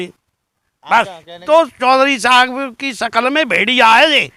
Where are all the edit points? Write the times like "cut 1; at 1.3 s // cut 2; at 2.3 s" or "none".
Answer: cut 1; at 1.4 s